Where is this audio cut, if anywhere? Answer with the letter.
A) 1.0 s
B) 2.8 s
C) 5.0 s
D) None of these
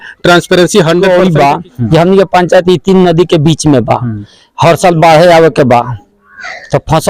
A